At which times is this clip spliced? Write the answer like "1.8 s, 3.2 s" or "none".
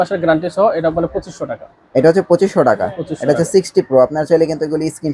none